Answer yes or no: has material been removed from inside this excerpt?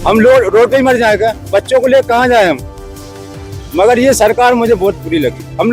no